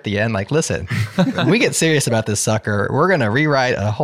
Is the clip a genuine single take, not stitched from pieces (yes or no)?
yes